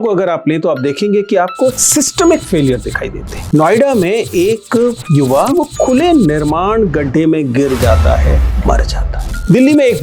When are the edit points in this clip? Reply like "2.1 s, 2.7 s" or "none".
none